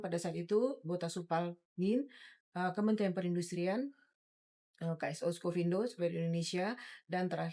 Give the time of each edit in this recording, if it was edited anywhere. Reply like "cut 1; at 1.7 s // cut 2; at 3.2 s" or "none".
none